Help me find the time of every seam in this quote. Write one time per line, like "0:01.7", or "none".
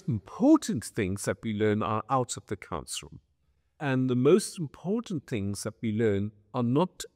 none

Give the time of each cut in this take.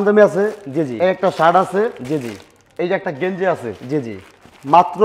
none

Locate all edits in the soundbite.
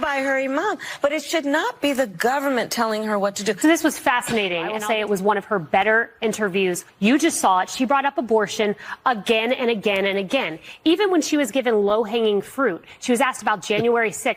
0:03.6
0:04.8
0:06.9

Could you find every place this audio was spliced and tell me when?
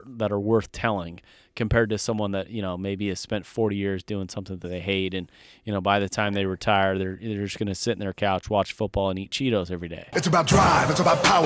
0:10.0

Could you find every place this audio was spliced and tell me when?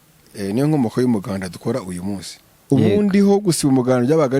0:02.5

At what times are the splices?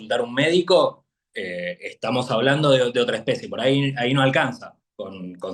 none

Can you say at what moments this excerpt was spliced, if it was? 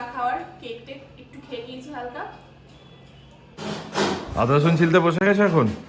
0:03.6

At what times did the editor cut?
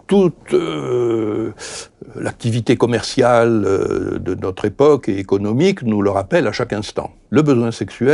0:07.1

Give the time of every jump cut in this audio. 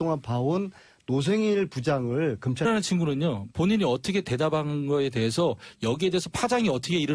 none

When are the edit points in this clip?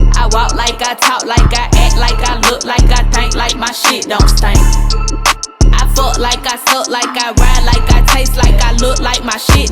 none

